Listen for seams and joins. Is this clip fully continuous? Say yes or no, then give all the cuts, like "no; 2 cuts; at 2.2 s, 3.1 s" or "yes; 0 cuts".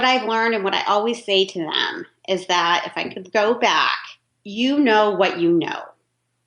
yes; 0 cuts